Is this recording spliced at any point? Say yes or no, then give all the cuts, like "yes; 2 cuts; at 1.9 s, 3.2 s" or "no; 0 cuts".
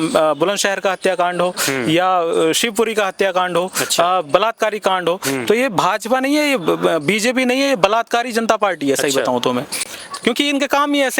no; 0 cuts